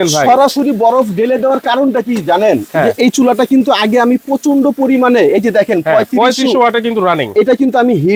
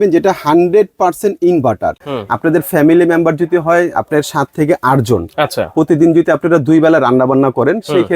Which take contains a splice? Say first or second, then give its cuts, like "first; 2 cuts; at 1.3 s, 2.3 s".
second; 1 cut; at 2.0 s